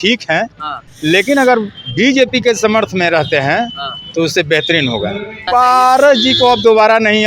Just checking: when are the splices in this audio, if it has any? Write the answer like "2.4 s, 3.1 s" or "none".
5.4 s